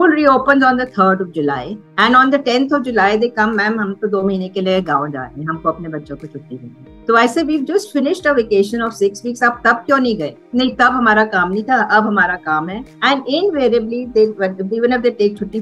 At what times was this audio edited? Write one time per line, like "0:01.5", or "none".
none